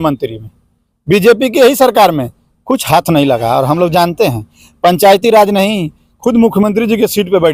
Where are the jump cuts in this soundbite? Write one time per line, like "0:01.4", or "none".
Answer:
none